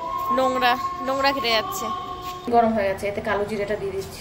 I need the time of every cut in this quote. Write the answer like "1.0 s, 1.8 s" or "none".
2.5 s